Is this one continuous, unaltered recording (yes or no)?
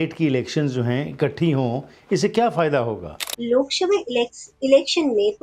no